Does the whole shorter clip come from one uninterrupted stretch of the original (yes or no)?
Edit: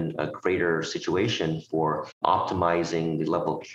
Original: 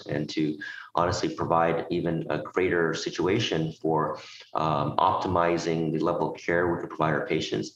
no